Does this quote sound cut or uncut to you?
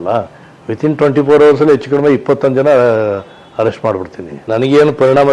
cut